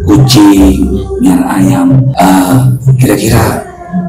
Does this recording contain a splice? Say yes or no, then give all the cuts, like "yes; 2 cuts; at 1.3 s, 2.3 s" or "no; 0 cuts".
yes; 1 cut; at 2.1 s